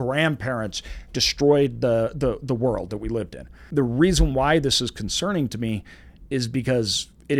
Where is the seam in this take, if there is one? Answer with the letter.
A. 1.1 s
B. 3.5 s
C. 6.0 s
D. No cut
B